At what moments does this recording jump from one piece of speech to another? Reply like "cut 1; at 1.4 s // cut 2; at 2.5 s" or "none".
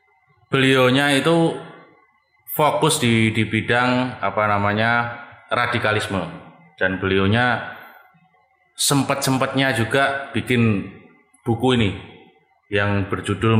none